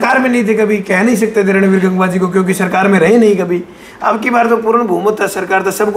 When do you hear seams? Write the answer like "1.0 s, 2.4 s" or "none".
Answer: none